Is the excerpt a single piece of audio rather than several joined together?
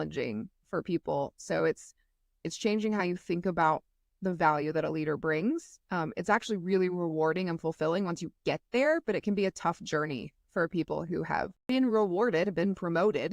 no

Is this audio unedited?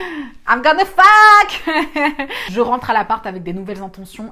yes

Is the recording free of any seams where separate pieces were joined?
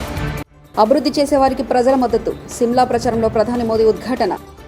yes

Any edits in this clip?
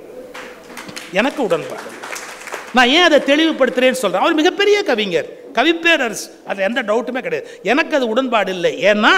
no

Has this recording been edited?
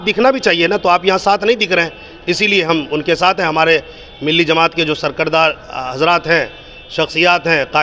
no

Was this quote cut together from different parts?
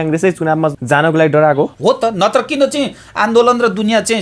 yes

